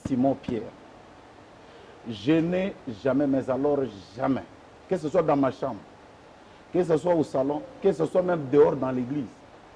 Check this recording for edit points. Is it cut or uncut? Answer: uncut